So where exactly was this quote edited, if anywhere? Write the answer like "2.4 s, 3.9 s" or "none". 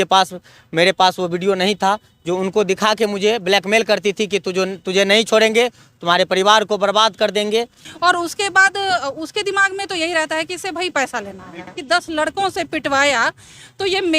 7.8 s, 11.8 s